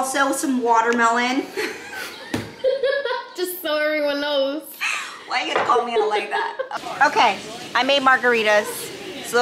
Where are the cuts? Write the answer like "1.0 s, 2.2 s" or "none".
6.7 s